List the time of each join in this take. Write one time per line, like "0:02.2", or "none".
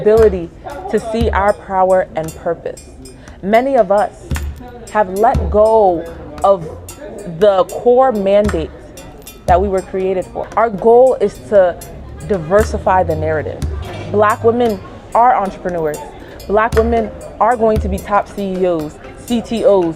0:10.4